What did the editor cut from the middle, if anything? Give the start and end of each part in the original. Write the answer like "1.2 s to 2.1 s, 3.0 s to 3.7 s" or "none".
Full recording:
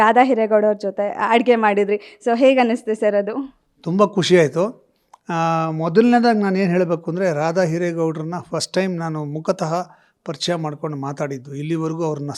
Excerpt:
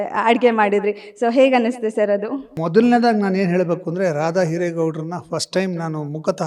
3.6 s to 5.8 s